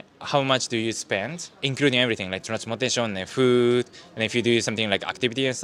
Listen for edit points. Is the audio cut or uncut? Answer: uncut